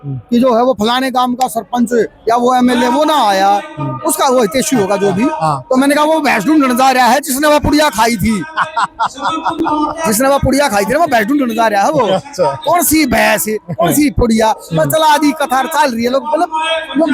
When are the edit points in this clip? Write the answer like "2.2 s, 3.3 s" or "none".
none